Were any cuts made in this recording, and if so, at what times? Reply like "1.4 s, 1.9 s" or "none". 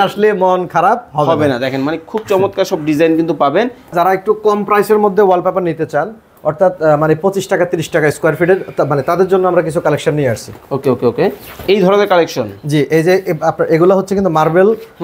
3.9 s